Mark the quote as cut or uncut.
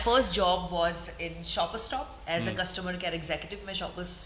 uncut